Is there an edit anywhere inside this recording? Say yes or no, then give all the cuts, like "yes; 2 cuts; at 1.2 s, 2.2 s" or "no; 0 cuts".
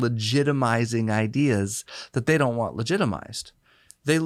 no; 0 cuts